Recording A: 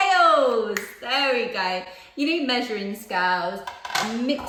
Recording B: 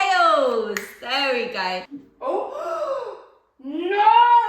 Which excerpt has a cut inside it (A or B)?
B